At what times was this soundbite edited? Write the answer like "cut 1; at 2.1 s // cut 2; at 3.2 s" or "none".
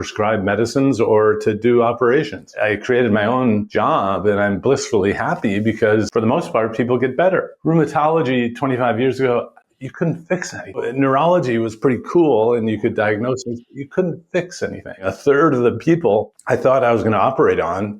cut 1; at 2.6 s // cut 2; at 3.7 s // cut 3; at 6.1 s // cut 4; at 7.5 s // cut 5; at 10.8 s // cut 6; at 15.1 s // cut 7; at 16.4 s